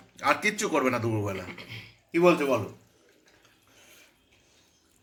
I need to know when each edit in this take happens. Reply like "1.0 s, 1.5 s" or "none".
none